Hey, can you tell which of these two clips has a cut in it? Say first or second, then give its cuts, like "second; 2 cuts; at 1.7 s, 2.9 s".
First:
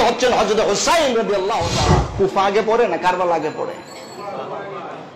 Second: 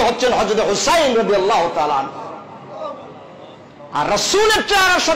first; 1 cut; at 2.1 s